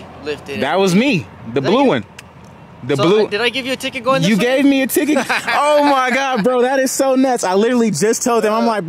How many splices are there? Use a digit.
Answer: 0